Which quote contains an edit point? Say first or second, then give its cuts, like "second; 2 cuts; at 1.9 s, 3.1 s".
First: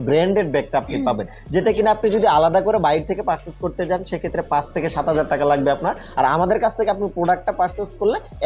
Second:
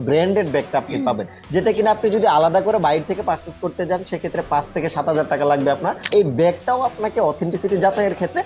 second; 1 cut; at 6.1 s